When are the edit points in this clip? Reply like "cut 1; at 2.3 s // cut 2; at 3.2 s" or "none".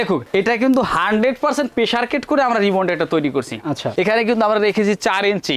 cut 1; at 3.9 s